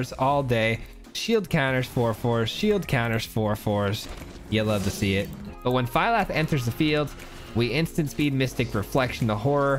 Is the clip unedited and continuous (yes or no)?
no